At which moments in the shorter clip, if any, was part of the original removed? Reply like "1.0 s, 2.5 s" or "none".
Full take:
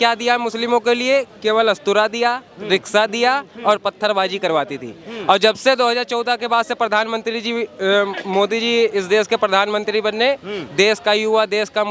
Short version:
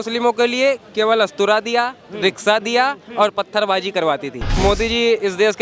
4.5 s